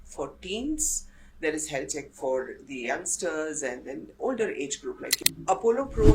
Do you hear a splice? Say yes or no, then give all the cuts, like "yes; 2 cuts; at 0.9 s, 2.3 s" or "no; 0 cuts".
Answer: yes; 1 cut; at 5.2 s